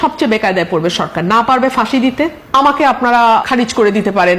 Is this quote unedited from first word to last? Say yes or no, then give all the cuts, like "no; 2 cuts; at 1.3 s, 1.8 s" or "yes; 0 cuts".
no; 2 cuts; at 2.4 s, 3.5 s